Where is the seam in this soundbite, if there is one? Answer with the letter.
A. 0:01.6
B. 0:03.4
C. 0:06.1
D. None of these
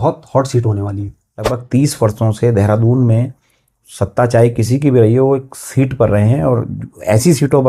A